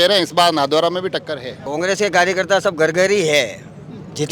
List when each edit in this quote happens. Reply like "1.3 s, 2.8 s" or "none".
1.7 s